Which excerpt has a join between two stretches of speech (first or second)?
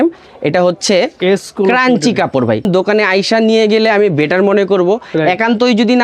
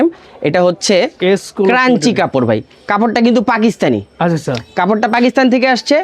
first